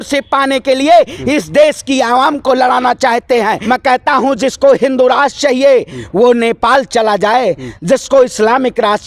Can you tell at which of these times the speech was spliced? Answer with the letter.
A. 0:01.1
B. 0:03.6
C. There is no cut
B